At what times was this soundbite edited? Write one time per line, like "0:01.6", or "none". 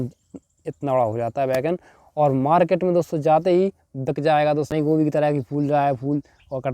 0:04.7